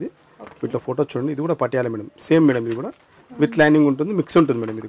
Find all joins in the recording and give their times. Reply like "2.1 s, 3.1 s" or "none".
none